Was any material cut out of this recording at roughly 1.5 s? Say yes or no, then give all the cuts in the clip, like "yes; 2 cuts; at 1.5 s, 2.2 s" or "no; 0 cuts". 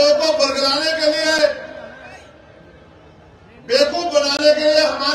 no; 0 cuts